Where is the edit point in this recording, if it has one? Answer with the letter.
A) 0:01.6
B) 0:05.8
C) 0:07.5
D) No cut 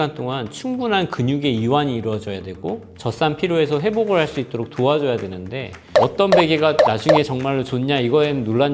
B